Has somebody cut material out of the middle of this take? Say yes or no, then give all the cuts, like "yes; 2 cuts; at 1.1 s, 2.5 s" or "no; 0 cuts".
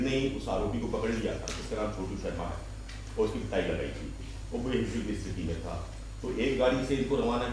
no; 0 cuts